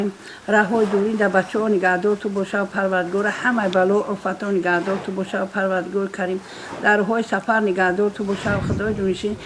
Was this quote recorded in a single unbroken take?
yes; 0 cuts

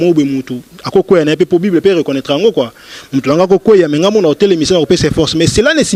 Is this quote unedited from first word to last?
yes; 0 cuts

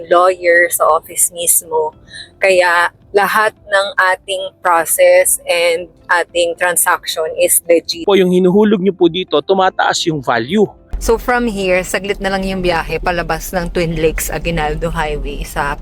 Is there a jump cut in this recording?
yes; 2 cuts; at 8.0 s, 10.9 s

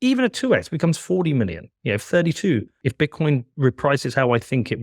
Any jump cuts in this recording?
yes; 1 cut; at 2.8 s

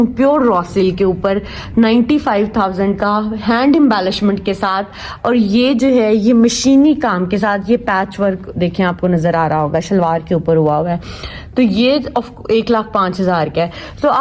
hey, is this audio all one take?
yes; 0 cuts

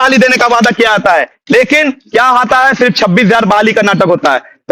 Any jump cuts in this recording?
no; 0 cuts

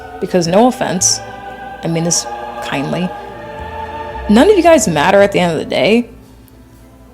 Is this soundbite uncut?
yes; 0 cuts

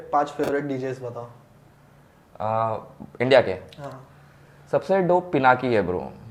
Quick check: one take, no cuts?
yes; 0 cuts

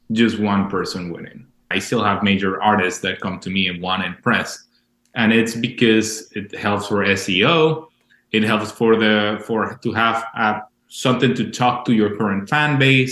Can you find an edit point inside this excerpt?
yes; 1 cut; at 1.7 s

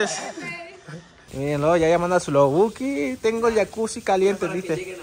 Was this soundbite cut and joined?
yes; 1 cut; at 1.4 s

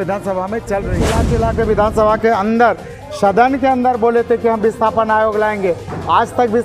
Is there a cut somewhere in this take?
yes; 1 cut; at 1.2 s

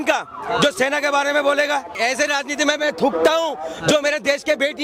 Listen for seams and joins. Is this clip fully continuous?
no; 1 cut; at 2.0 s

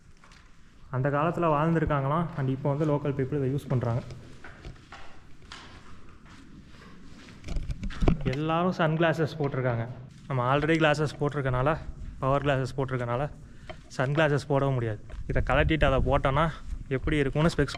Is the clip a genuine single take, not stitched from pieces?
yes; 0 cuts

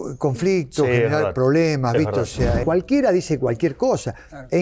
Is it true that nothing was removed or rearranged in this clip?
no; 1 cut; at 2.6 s

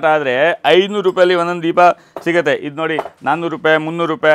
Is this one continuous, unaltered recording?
yes; 0 cuts

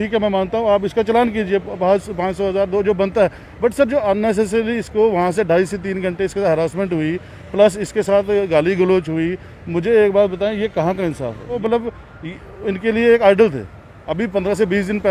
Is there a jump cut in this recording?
yes; 1 cut; at 11.6 s

